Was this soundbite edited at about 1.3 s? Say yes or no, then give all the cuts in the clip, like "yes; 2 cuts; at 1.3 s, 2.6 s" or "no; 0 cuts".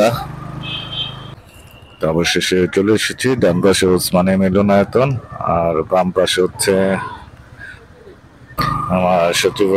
yes; 2 cuts; at 1.3 s, 8.6 s